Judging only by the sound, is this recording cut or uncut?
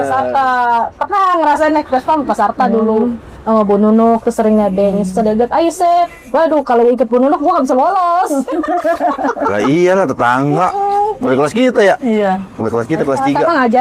uncut